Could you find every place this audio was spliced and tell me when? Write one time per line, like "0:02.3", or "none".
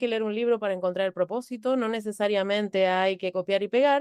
none